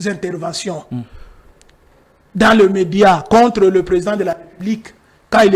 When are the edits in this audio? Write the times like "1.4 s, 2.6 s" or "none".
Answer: none